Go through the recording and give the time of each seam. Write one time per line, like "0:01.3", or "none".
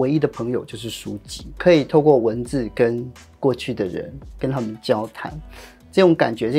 none

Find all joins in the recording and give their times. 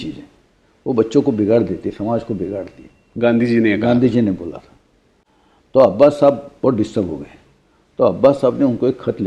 none

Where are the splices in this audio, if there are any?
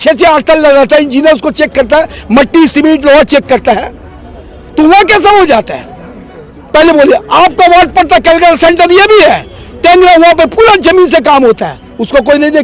none

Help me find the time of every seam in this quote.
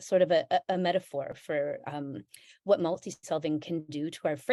none

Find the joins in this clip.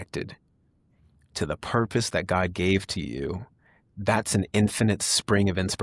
none

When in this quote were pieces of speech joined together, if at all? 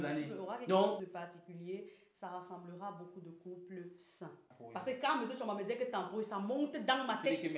0:01.0
0:04.5

